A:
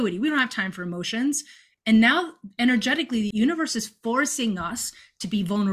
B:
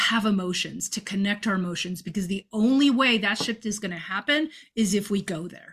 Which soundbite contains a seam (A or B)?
A